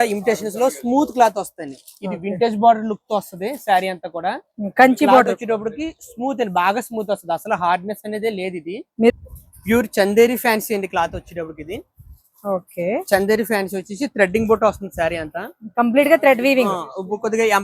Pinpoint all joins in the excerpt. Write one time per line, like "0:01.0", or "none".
0:09.1

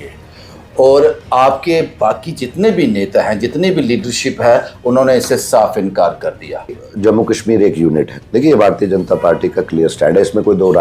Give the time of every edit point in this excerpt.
0:06.8

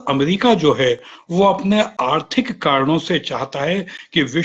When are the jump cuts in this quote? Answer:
none

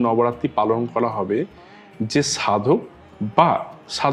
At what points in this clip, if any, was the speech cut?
none

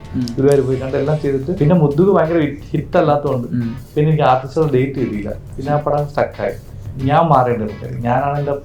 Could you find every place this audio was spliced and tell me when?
0:01.5
0:06.8

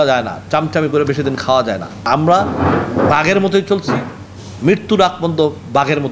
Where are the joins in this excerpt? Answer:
0:02.1

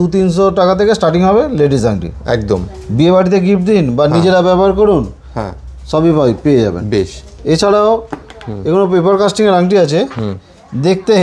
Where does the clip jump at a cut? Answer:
none

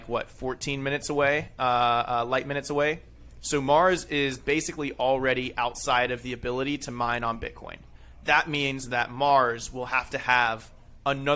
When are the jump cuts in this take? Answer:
none

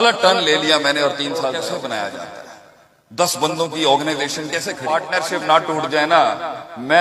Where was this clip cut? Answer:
0:01.5
0:04.9

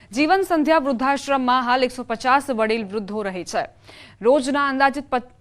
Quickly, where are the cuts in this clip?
0:02.6

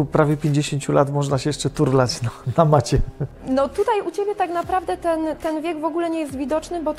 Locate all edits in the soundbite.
none

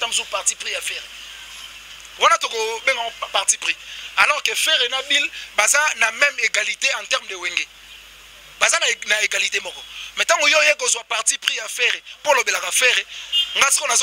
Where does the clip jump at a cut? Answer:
none

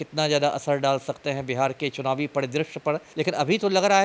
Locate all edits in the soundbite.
0:03.1

